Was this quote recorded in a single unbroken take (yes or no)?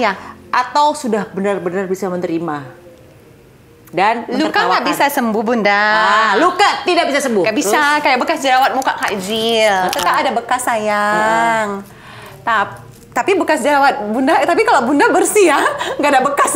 yes